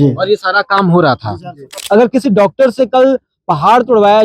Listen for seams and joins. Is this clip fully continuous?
no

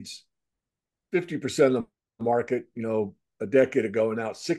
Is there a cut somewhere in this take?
no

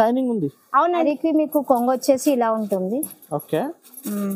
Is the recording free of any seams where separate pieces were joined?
no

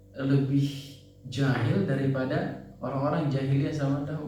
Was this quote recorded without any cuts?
yes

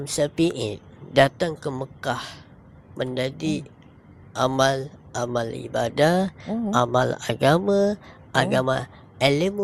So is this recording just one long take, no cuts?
yes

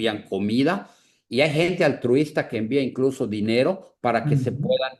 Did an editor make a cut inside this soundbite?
no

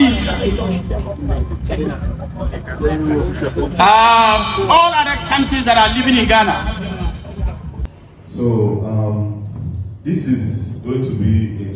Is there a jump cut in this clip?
yes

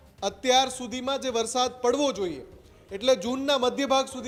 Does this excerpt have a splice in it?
no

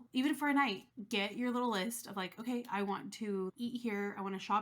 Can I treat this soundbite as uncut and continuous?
no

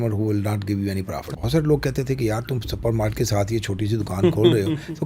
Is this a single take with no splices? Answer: no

